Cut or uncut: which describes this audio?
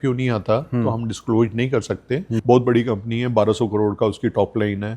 cut